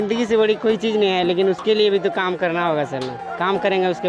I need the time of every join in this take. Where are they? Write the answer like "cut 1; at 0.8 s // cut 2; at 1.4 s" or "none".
none

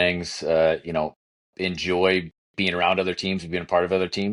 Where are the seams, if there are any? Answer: none

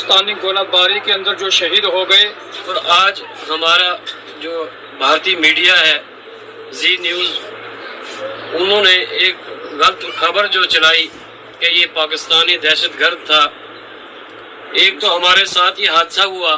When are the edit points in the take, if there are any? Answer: cut 1; at 2.7 s

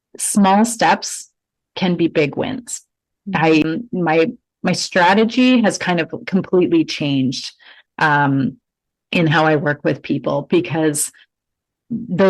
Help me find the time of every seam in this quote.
cut 1; at 3.6 s

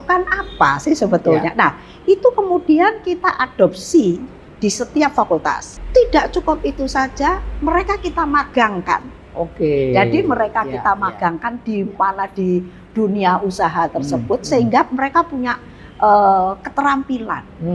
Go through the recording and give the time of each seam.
cut 1; at 5.7 s

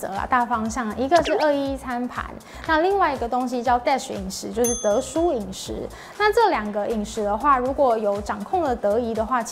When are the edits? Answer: none

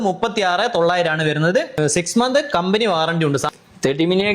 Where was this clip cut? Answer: cut 1; at 1.8 s // cut 2; at 3.5 s

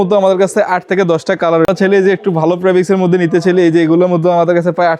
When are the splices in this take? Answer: cut 1; at 1.7 s

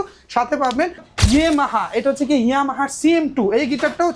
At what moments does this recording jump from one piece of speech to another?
cut 1; at 1.1 s

